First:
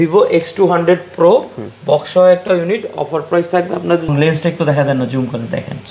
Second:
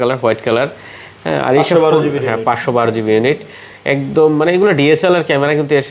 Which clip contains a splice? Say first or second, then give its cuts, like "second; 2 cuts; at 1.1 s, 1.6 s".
first; 1 cut; at 4.1 s